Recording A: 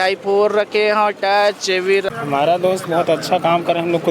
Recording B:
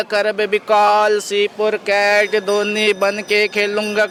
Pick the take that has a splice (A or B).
A